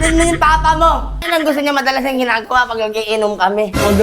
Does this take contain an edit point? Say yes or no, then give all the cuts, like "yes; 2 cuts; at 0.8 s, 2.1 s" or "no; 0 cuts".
yes; 1 cut; at 1.1 s